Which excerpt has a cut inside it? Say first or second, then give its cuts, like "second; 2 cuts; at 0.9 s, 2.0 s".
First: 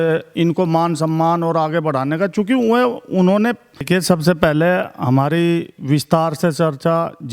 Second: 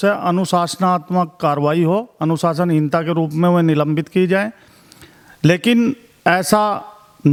first; 1 cut; at 3.9 s